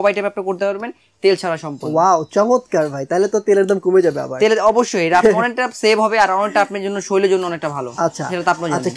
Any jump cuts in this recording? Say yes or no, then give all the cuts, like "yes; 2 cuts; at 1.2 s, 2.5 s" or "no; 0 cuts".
no; 0 cuts